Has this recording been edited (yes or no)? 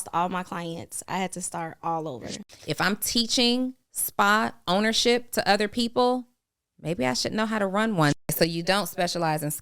yes